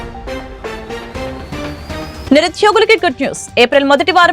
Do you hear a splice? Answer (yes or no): yes